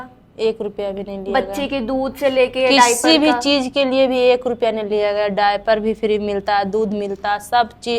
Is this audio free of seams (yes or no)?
yes